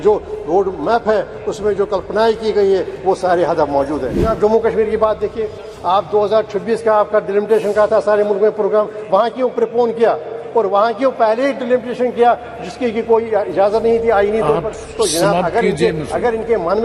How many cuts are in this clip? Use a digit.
1